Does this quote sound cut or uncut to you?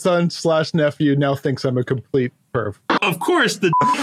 cut